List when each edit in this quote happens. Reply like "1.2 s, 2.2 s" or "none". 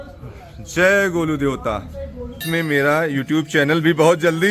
2.4 s